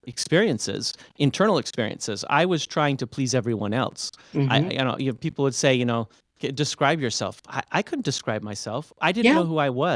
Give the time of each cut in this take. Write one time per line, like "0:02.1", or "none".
none